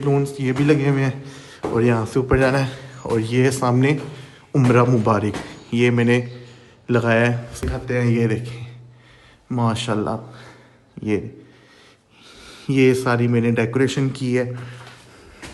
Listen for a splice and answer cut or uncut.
cut